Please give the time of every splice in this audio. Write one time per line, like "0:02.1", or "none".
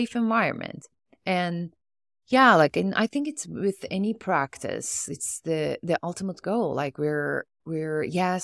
none

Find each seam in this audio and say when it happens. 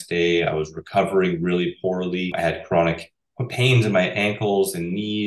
0:02.3

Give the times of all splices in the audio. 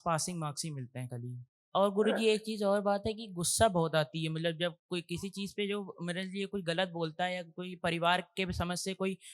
0:01.5

